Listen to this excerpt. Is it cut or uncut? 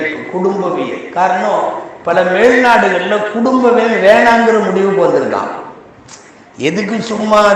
uncut